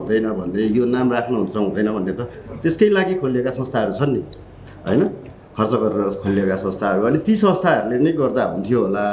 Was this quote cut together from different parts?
no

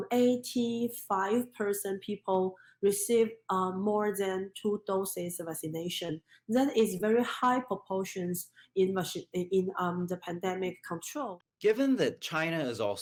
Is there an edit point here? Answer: no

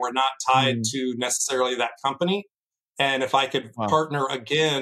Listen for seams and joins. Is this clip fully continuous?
yes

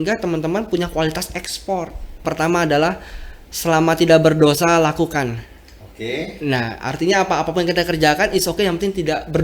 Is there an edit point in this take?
yes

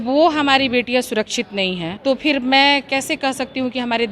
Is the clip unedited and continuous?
no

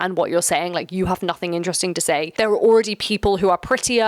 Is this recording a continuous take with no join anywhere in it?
no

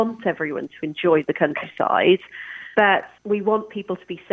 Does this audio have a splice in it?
yes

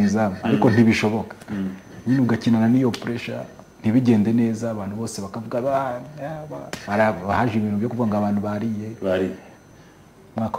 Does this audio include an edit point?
yes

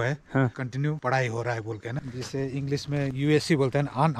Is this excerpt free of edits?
no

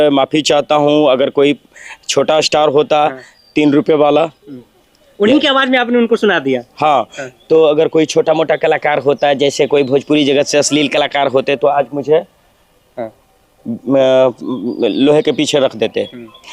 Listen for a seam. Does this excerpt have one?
no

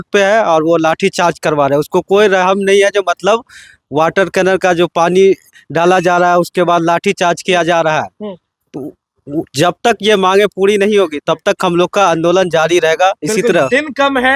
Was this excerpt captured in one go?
yes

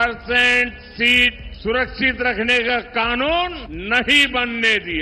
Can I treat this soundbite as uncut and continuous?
no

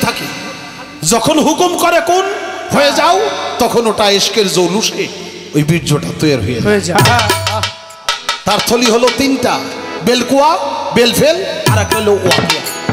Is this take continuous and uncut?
yes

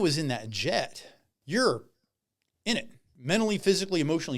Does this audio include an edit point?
yes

